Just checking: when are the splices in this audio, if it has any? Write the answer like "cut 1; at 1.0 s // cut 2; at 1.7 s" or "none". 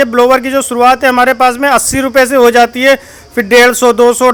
none